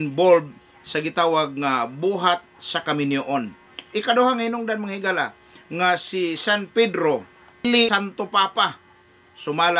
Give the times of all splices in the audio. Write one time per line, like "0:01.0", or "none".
0:07.9